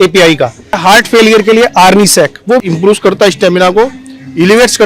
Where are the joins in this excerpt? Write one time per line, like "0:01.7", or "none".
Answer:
0:00.8
0:02.6